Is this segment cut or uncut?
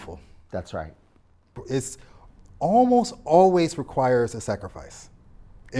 cut